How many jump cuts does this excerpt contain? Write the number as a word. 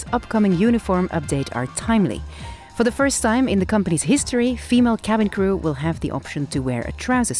zero